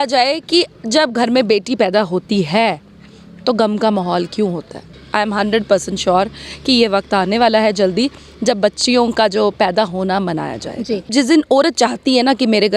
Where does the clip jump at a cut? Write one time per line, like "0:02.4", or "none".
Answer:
0:05.0
0:11.1